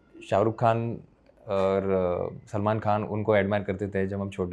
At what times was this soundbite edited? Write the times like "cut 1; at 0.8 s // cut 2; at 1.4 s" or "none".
none